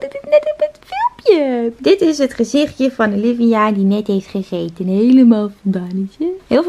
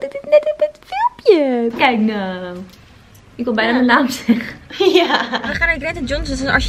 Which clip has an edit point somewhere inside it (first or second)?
second